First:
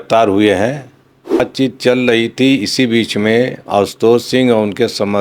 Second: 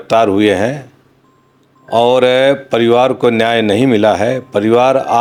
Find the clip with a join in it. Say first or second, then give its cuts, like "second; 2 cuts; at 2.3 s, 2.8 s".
first; 1 cut; at 1.4 s